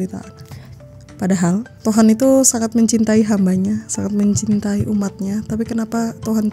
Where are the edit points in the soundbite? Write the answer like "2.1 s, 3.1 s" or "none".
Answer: 1.7 s